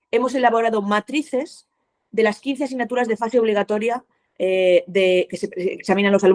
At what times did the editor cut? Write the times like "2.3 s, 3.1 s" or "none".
none